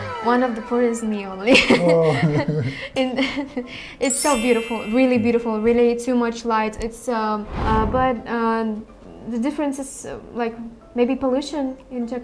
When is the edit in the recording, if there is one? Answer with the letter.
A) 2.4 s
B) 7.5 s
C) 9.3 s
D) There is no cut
B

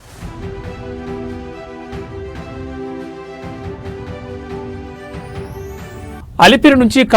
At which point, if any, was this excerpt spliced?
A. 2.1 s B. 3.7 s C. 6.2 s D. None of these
C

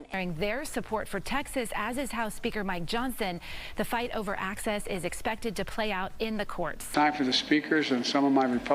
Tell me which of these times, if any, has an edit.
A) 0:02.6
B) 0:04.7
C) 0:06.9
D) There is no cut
C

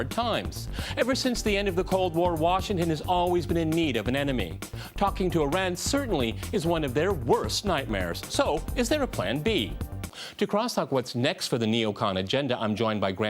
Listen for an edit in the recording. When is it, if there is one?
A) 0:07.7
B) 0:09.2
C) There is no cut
B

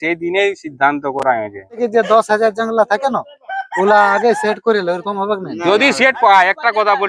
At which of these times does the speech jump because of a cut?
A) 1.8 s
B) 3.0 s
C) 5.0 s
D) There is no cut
A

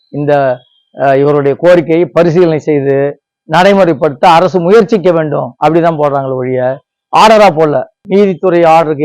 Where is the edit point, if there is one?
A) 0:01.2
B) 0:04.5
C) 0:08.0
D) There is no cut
C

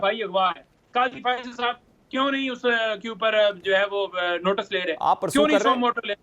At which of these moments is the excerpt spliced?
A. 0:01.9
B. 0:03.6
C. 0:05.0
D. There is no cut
D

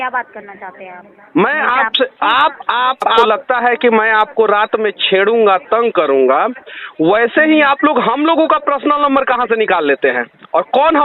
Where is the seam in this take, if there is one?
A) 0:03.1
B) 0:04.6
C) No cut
A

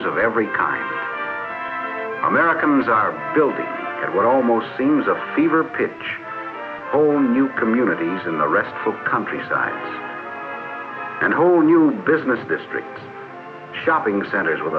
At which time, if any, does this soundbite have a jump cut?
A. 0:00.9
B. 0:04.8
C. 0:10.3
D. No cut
D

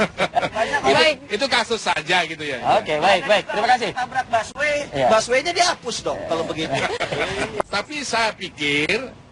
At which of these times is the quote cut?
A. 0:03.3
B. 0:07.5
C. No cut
B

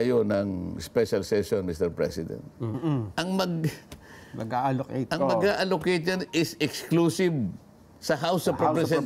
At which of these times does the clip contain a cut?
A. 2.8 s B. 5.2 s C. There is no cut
A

